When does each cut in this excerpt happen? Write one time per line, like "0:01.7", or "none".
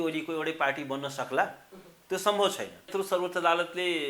0:02.9

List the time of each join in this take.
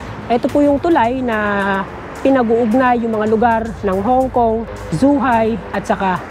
0:03.7
0:04.8

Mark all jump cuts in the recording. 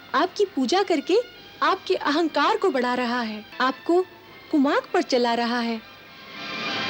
0:03.4

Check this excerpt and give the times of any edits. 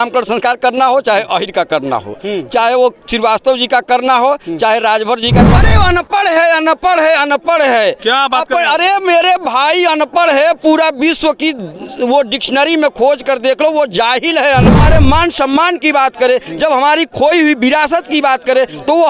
0:05.5
0:14.8

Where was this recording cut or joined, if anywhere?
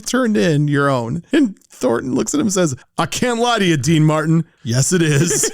0:02.8

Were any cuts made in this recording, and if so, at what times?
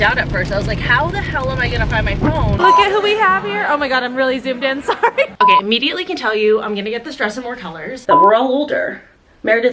0:02.6
0:05.3
0:07.9

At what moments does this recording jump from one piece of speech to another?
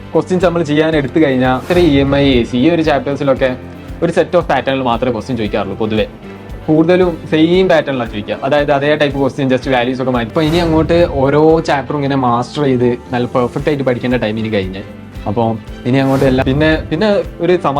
0:01.7
0:10.3
0:16.4

